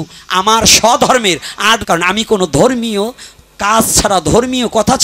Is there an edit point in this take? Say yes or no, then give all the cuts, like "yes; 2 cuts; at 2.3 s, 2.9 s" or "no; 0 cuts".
yes; 1 cut; at 1.8 s